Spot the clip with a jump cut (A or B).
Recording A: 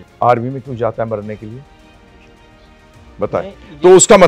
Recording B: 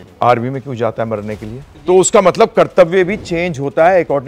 B